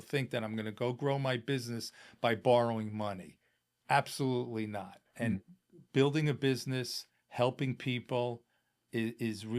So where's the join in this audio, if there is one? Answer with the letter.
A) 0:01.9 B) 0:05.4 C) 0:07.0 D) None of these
B